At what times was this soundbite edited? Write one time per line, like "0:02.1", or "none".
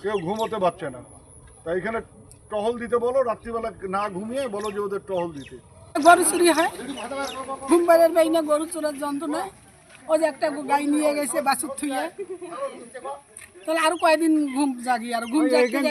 0:05.8